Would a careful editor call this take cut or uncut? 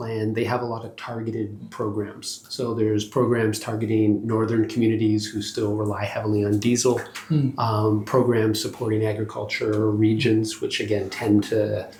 uncut